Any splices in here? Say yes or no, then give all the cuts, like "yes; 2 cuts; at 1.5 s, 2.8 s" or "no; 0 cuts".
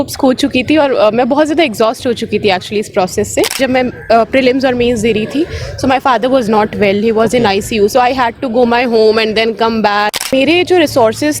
yes; 2 cuts; at 3.6 s, 10.2 s